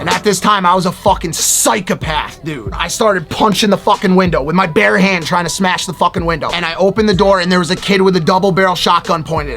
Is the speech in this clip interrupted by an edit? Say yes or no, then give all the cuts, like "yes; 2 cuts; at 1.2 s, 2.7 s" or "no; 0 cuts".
yes; 2 cuts; at 2.8 s, 6.6 s